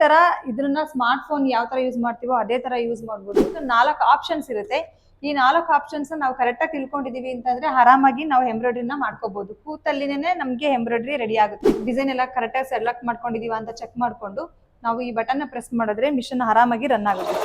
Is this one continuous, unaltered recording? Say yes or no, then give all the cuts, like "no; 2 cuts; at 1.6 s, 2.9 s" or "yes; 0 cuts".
no; 2 cuts; at 3.6 s, 11.8 s